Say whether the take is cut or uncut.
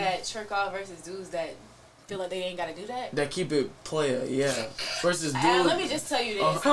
uncut